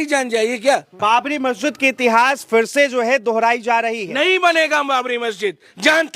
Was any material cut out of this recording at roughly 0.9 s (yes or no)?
yes